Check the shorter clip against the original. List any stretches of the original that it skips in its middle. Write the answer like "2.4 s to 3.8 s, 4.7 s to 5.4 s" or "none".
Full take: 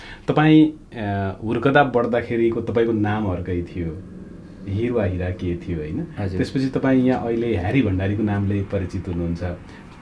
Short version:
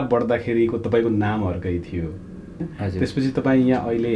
4.5 s to 6.0 s